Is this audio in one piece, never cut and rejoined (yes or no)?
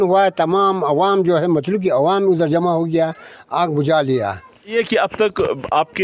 yes